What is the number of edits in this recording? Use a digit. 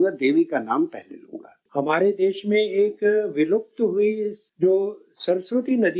1